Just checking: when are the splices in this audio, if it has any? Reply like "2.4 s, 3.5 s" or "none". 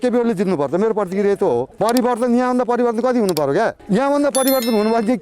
1.7 s